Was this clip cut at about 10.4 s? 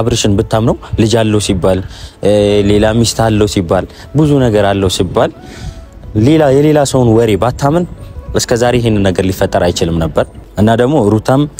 yes; 1 cut; at 10.4 s

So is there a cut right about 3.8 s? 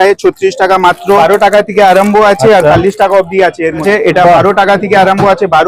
yes; 2 cuts; at 1.2 s, 3.8 s

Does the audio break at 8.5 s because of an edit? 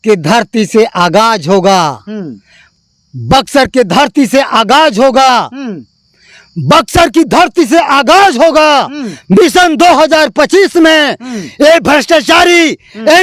no; 0 cuts

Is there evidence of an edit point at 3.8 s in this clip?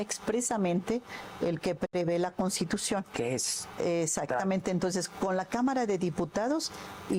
no; 0 cuts

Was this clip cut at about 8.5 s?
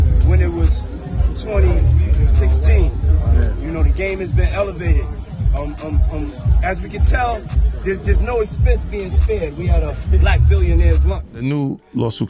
no; 1 cut; at 11.3 s

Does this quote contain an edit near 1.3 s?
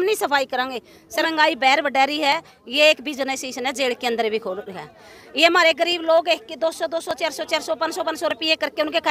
yes; 1 cut; at 1.3 s

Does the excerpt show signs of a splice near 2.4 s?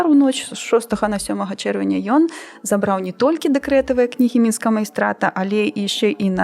no; 0 cuts

